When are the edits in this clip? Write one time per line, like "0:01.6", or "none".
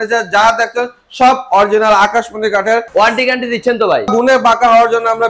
0:02.9
0:04.1